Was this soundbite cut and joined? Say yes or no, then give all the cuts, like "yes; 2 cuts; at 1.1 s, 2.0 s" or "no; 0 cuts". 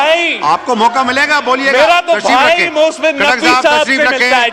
no; 0 cuts